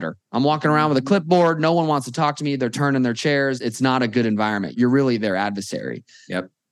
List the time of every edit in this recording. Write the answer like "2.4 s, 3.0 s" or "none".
3.6 s, 4.7 s